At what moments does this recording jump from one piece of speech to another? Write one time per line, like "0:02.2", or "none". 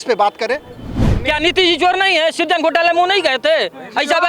0:01.1